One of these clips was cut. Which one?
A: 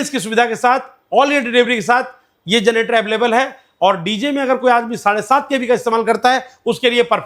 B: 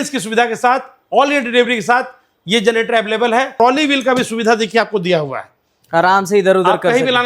B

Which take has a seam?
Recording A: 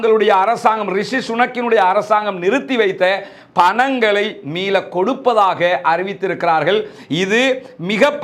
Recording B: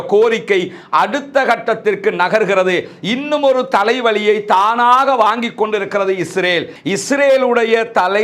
B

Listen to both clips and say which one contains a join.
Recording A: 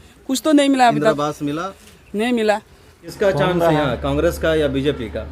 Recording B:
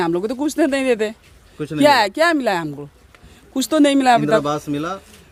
A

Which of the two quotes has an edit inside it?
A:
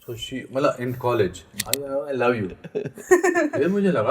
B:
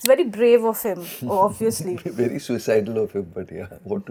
A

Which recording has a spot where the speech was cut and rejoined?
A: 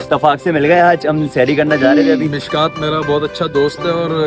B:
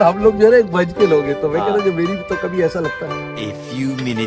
B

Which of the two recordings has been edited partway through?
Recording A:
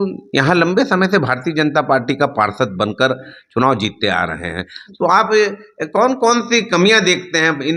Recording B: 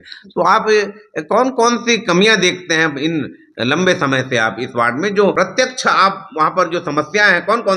B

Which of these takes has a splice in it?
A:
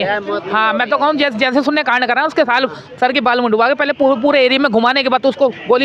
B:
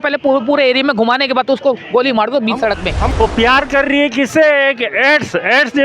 B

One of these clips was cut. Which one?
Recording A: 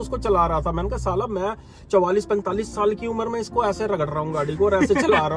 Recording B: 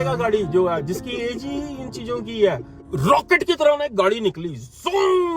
B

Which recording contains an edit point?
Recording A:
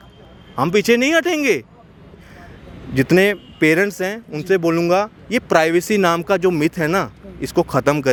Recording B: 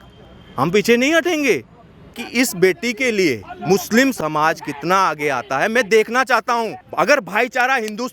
B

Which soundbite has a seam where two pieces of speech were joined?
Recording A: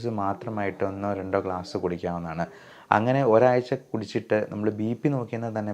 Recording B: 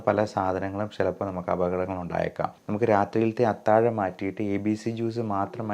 B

